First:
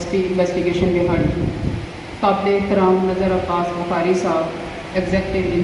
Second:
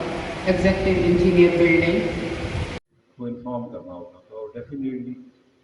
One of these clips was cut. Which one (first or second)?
second